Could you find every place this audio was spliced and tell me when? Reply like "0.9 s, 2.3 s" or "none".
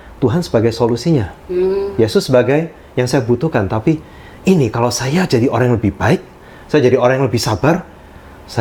none